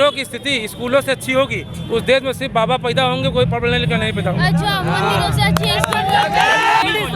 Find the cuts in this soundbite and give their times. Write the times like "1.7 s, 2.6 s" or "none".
none

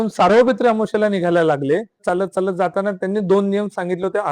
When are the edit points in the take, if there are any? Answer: 2.0 s

